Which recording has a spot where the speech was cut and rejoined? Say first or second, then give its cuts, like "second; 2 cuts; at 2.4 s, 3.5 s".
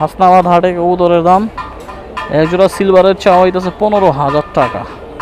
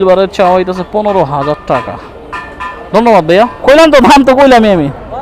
second; 1 cut; at 3.6 s